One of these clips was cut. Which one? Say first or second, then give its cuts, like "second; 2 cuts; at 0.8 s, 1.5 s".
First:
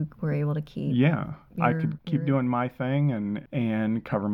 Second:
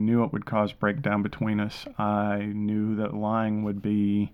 first; 2 cuts; at 2.0 s, 3.4 s